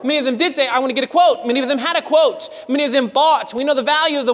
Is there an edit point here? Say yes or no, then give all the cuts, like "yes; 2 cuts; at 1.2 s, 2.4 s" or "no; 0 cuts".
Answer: no; 0 cuts